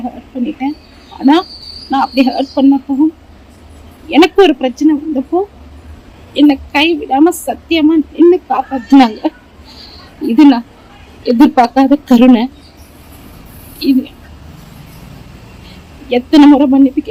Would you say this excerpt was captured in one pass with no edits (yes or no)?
yes